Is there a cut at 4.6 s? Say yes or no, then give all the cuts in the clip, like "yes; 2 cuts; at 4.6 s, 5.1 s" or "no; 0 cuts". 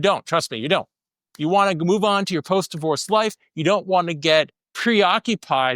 yes; 1 cut; at 4.6 s